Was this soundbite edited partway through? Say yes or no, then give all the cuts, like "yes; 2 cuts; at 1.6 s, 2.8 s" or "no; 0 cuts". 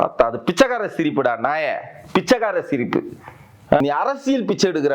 yes; 1 cut; at 3.8 s